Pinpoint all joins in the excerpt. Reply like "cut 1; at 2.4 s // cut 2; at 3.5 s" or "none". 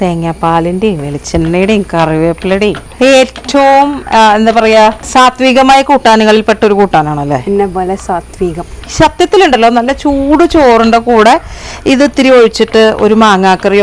cut 1; at 8.8 s